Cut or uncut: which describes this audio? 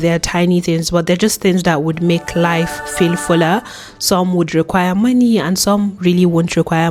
uncut